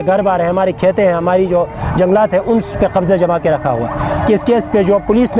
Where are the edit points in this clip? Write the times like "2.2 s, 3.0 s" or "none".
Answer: 4.1 s